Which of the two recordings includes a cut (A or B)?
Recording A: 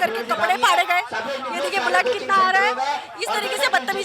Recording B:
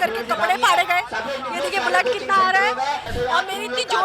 B